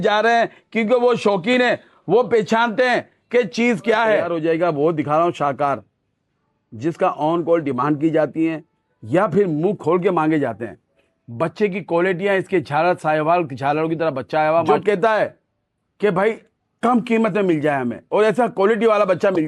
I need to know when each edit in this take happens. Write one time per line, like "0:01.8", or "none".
0:04.2
0:14.7

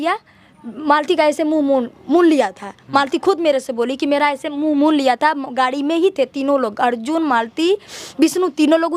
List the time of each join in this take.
none

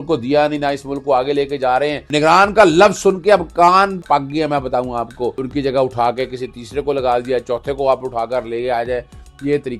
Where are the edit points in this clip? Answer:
0:02.1
0:04.0
0:05.4

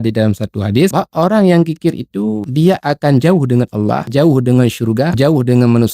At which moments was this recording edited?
0:00.9
0:02.4
0:04.0
0:05.1

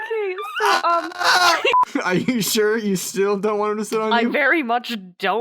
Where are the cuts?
0:01.8

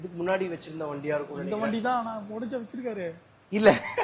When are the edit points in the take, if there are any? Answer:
none

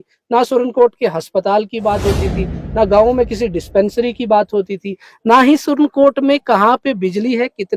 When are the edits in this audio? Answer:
none

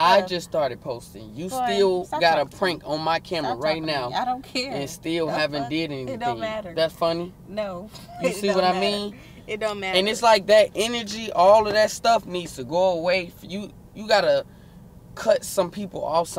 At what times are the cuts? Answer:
none

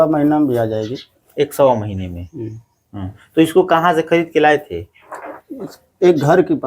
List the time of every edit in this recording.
none

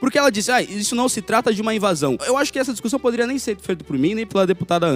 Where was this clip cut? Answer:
none

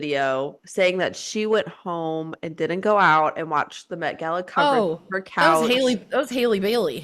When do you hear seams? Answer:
none

